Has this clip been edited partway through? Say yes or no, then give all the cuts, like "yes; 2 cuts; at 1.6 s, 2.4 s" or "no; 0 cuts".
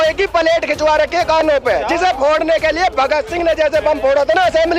no; 0 cuts